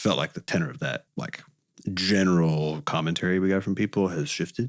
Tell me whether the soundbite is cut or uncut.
uncut